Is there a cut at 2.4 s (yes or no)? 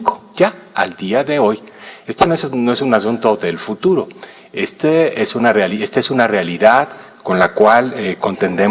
yes